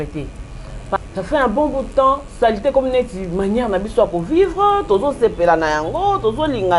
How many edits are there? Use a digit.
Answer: 1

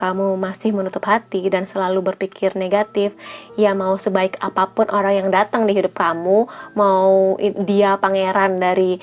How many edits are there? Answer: 0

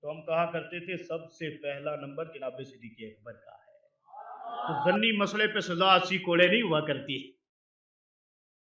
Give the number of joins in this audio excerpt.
1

